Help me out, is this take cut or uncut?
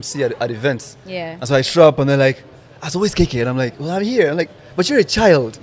uncut